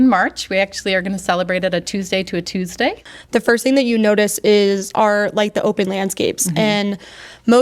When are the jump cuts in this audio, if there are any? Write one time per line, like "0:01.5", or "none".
0:03.0